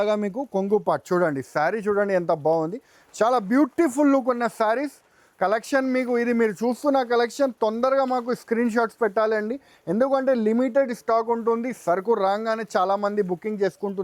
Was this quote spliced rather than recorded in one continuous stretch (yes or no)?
no